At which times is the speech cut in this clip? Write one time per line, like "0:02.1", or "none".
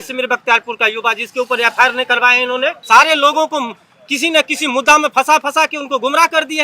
0:02.8